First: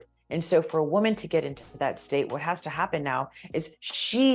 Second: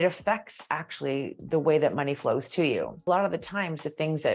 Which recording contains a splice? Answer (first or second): second